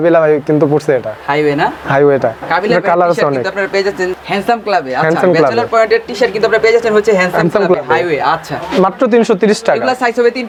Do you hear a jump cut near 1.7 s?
no; 0 cuts

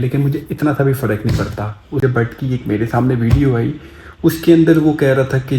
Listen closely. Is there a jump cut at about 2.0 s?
yes; 1 cut; at 2.0 s

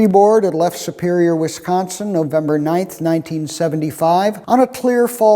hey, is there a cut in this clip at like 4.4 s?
yes; 1 cut; at 4.4 s

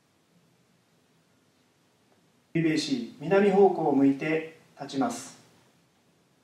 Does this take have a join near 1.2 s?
no; 1 cut; at 2.6 s

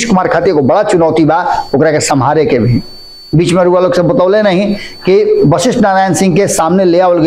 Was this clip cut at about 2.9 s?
no; 0 cuts

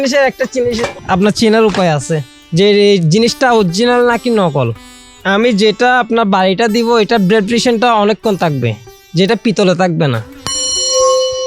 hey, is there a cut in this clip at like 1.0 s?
yes; 2 cuts; at 1.0 s, 4.9 s

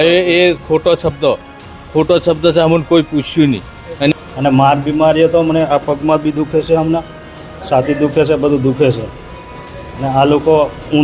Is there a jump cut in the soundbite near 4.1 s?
yes; 1 cut; at 4.1 s

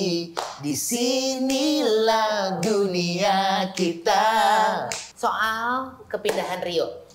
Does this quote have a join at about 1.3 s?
no; 1 cut; at 5.0 s

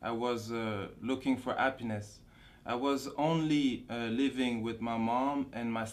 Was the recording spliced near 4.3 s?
no; 1 cut; at 2.0 s

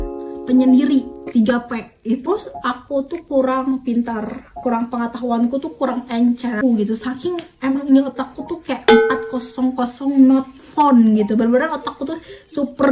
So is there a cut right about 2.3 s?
yes; 2 cuts; at 2.3 s, 6.6 s

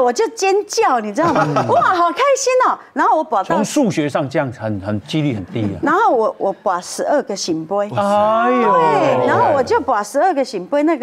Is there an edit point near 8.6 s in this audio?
no; 0 cuts

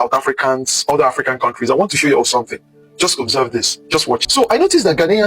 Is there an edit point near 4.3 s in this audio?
yes; 1 cut; at 4.3 s

